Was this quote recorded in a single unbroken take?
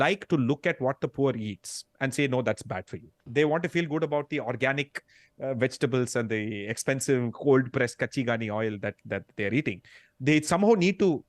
no; 1 cut; at 3.2 s

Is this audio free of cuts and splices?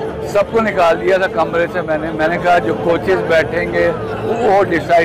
yes; 0 cuts

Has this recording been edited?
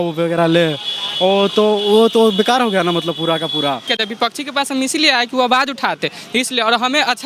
yes; 1 cut; at 3.9 s

